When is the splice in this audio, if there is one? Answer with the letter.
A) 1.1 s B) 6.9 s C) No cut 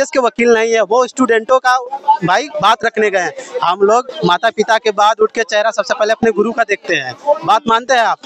C